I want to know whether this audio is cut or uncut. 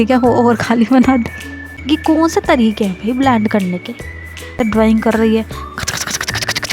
cut